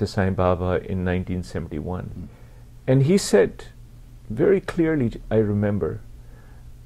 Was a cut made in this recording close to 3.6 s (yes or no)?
no